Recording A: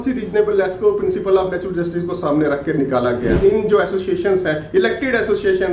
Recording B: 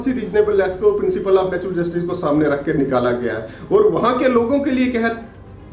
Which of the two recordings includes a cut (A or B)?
A